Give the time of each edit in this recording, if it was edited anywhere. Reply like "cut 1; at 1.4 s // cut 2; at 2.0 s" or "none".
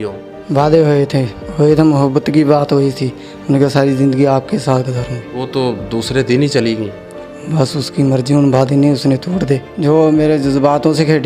cut 1; at 9.7 s

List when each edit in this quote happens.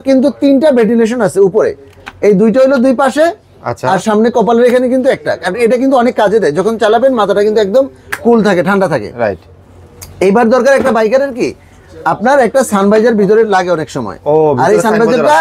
none

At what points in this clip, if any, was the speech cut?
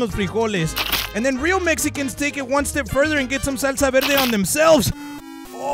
none

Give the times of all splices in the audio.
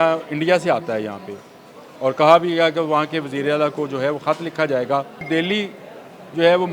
cut 1; at 5.3 s

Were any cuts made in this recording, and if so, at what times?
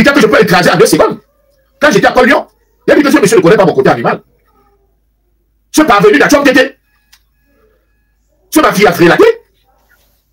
none

